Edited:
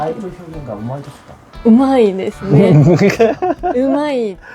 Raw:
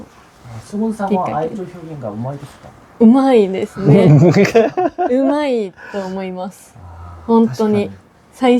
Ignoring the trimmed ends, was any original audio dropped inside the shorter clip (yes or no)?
no